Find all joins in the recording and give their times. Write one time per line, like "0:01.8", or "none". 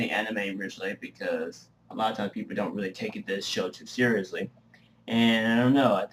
0:01.8

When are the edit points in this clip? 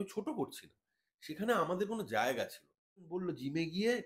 0:03.1

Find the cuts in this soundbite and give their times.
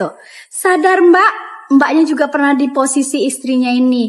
none

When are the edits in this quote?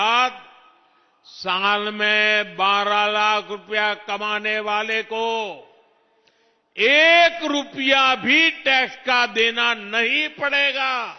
none

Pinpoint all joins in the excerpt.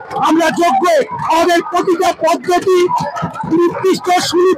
none

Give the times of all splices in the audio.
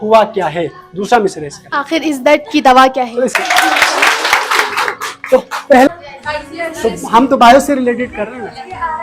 0:03.4
0:05.9

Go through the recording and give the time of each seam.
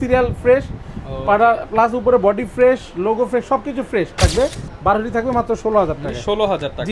0:04.2

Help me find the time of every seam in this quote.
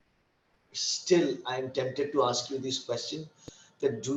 none

